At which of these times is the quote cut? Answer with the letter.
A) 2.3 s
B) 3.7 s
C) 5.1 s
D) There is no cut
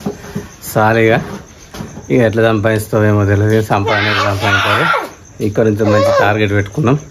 D